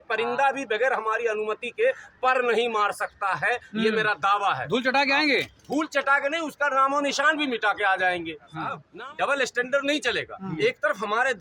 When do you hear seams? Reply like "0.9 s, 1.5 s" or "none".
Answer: 8.8 s